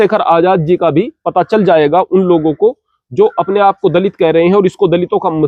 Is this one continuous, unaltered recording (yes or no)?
yes